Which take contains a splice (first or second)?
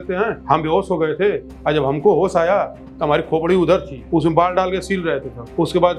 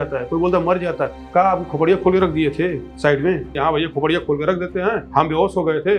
second